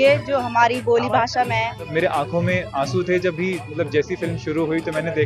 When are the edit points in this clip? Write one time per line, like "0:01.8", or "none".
0:01.9